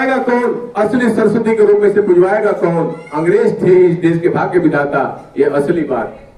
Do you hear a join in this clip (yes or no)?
no